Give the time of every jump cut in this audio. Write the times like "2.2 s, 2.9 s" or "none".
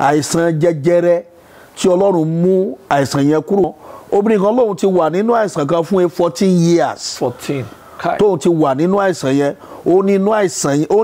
3.7 s